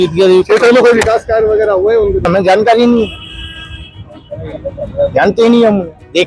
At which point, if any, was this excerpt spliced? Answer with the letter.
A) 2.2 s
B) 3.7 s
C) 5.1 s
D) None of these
A